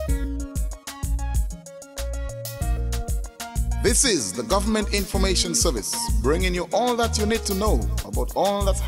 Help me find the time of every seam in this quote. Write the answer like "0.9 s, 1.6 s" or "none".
none